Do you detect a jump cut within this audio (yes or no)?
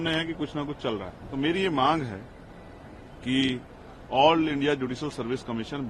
yes